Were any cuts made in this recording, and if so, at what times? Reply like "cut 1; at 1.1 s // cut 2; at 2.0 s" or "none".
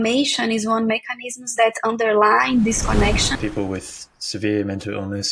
cut 1; at 3.3 s